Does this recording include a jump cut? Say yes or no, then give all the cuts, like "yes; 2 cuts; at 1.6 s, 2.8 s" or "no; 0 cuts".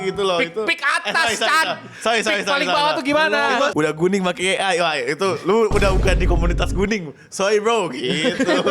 yes; 1 cut; at 3.7 s